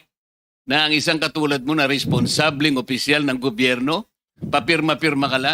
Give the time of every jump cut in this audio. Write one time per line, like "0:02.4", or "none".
none